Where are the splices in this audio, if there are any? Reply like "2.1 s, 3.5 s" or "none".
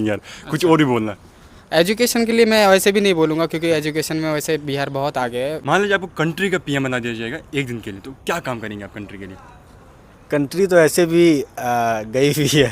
5.6 s